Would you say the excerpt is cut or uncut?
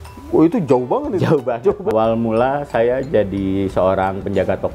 cut